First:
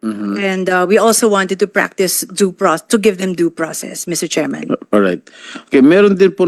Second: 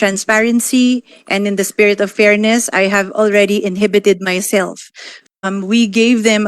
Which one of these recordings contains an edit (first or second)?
second